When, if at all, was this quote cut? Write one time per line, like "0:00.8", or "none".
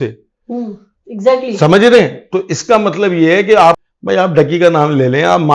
0:03.8